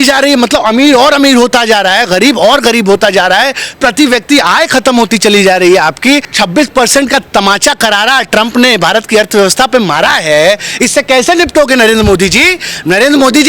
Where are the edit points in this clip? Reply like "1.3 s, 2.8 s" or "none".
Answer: 6.3 s